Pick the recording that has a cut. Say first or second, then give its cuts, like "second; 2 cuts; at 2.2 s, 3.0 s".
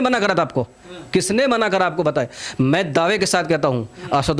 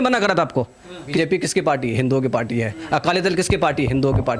second; 1 cut; at 1.1 s